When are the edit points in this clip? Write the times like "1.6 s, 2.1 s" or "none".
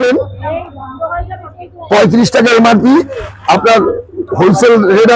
none